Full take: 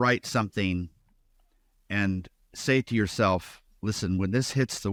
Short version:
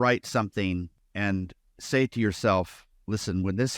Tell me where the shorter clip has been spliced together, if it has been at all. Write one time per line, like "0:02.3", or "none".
0:01.0